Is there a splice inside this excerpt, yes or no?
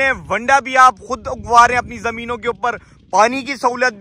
no